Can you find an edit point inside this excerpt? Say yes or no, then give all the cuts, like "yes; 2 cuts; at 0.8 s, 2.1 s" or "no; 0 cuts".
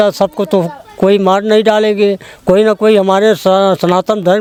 no; 0 cuts